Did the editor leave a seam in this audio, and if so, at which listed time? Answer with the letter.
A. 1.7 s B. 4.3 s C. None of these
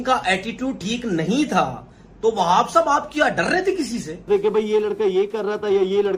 B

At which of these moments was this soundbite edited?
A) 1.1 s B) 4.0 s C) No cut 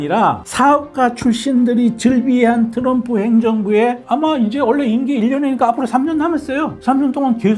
C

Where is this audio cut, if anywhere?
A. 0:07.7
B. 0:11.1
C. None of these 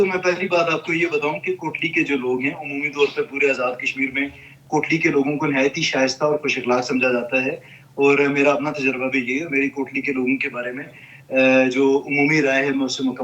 C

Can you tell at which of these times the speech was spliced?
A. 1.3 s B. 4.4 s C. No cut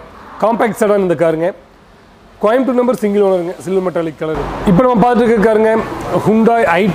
B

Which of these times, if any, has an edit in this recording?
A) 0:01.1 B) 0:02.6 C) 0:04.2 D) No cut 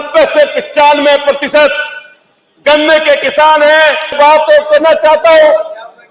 C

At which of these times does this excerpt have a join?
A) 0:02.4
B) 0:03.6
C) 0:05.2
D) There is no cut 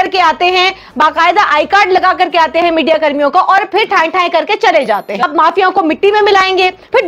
C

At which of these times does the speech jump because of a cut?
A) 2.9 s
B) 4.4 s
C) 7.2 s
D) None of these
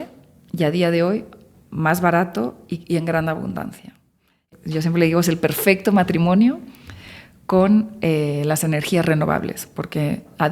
B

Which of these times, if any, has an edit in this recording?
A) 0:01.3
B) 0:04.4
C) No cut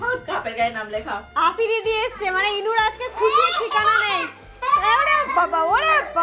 A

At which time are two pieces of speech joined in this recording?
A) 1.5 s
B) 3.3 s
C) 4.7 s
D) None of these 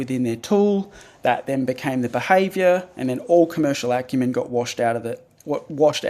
D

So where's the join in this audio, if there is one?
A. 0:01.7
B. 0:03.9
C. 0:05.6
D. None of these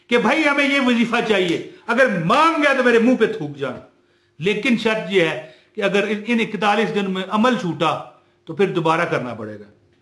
D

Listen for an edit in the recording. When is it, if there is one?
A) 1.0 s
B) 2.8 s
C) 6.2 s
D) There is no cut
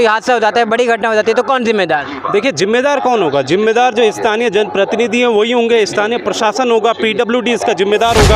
D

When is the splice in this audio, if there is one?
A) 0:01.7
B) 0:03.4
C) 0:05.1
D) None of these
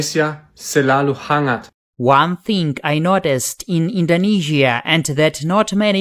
A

